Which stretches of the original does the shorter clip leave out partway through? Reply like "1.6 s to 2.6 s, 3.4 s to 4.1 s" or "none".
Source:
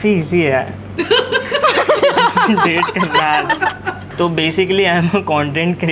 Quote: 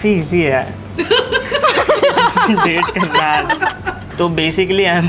none

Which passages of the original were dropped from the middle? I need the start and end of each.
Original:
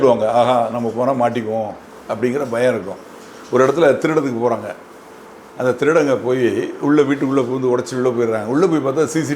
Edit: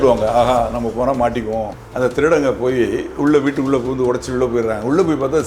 1.8 s to 5.4 s

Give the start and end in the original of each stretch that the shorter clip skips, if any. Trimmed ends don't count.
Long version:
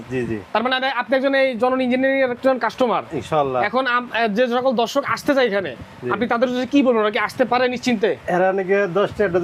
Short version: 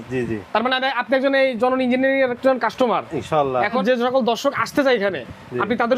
3.8 s to 4.3 s

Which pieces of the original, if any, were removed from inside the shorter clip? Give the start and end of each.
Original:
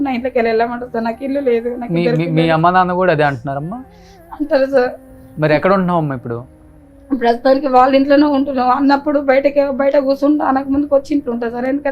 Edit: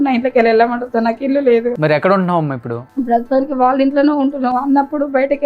1.7 s to 5.3 s, 6.4 s to 6.9 s

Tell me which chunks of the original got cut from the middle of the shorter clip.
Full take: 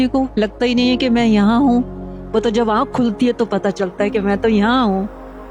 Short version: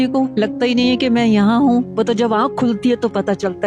1.9 s to 2.3 s

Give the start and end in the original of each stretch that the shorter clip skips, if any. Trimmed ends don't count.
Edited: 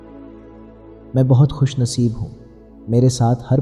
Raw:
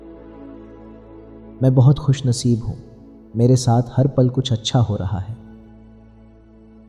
1.3 s to 1.5 s

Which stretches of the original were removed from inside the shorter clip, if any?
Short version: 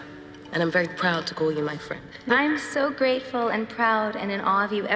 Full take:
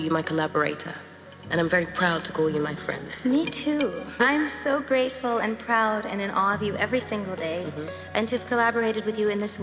3.1 s to 4.0 s

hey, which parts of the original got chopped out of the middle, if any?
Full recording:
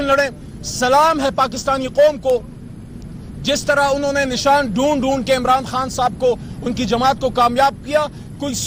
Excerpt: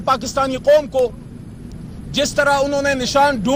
none

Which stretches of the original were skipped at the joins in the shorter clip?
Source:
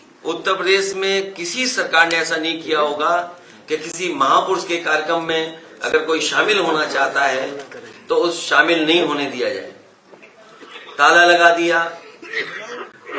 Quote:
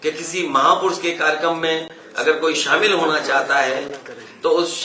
none

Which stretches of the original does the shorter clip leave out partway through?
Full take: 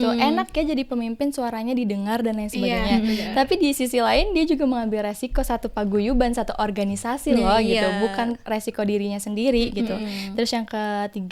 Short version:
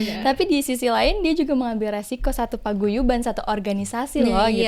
none

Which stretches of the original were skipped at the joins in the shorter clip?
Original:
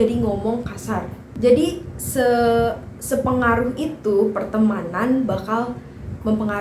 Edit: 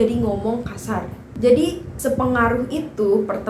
1.9 s to 2.9 s

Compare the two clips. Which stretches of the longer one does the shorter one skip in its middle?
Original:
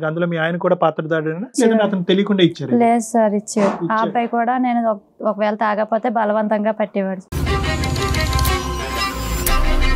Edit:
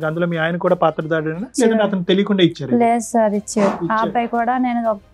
none

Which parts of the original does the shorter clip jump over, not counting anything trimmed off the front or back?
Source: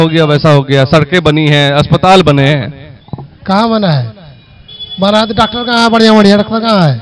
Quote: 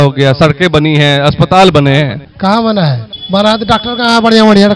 2.8 s to 3.3 s, 4.2 s to 4.8 s

